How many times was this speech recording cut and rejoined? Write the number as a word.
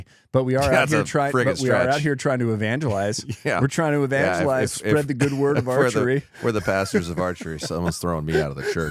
zero